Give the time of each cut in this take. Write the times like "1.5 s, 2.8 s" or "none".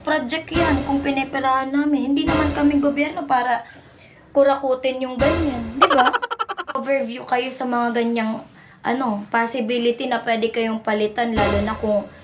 6.8 s